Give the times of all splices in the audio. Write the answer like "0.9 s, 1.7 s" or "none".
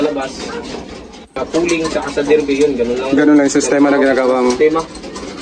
1.2 s